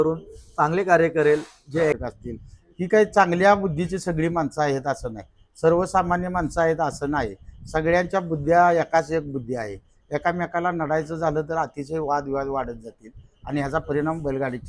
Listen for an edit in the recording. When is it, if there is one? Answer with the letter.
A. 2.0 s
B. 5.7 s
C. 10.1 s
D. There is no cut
A